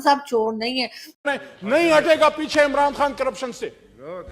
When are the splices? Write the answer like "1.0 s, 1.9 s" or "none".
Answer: 1.3 s